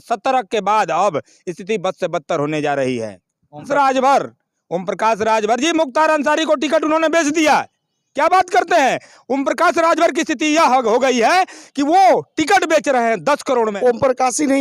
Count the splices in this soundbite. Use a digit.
2